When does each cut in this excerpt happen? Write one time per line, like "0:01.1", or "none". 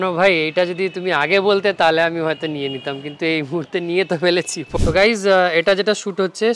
0:04.7